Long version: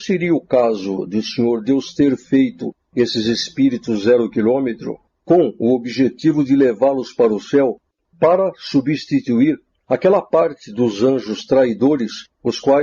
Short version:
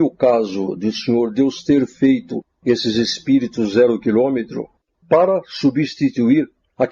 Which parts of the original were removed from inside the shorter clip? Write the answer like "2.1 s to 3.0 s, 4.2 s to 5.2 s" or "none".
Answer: 5.1 s to 7.9 s